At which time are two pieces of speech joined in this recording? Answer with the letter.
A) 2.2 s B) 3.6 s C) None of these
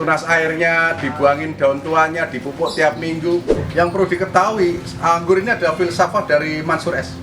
B